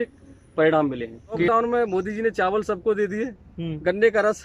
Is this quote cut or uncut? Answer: cut